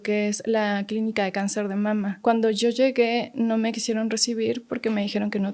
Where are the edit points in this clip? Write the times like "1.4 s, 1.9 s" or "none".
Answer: 2.2 s